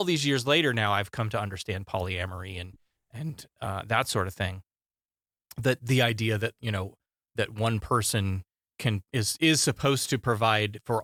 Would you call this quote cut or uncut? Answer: uncut